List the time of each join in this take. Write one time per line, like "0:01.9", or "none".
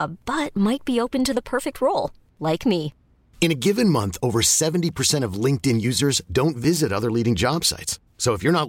none